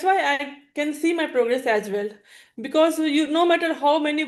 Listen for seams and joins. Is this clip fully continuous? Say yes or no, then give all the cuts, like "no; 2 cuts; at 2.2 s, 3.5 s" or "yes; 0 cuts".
yes; 0 cuts